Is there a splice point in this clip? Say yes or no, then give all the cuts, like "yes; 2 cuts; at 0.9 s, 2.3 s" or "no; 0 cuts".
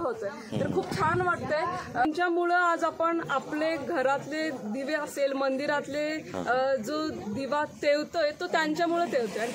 yes; 1 cut; at 2.0 s